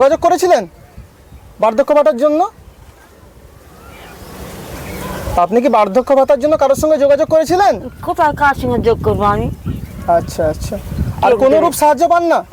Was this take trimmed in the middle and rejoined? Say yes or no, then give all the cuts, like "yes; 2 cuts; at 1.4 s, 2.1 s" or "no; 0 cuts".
no; 0 cuts